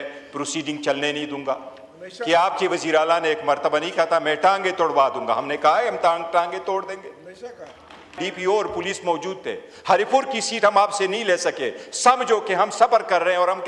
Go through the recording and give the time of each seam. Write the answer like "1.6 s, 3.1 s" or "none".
8.2 s